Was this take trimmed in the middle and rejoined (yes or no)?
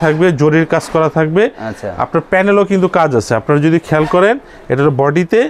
no